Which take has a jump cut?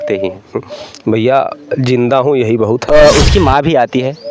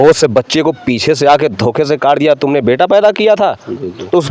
first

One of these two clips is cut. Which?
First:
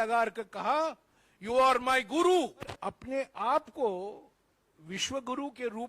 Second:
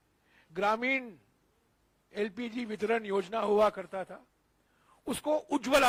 first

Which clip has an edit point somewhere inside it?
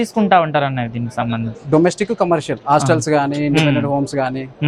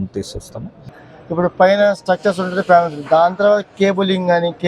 second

